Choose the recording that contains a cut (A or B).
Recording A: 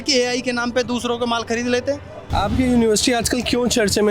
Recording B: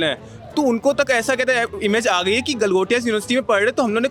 A